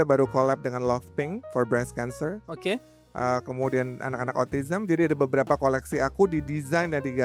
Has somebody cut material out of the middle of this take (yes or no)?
no